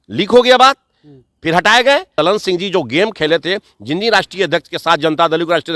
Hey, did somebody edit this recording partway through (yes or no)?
yes